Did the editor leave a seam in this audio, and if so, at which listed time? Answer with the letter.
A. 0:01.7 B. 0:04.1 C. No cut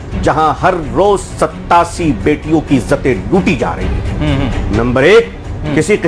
C